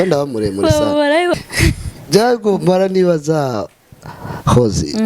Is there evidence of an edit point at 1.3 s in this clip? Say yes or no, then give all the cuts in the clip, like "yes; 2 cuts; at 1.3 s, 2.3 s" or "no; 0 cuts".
yes; 1 cut; at 1.3 s